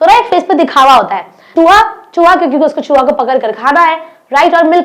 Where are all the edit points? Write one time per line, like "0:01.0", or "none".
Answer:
0:01.4